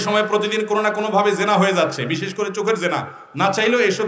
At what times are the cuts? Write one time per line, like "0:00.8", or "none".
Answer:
none